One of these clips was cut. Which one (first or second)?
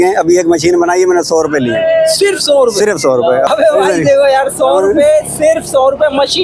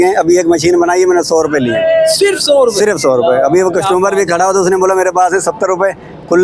first